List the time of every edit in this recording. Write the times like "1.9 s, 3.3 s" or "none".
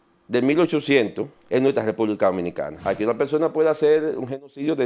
1.3 s, 2.7 s